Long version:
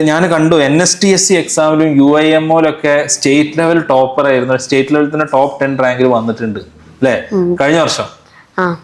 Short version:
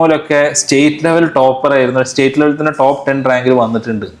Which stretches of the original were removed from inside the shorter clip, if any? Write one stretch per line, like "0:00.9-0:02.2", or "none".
none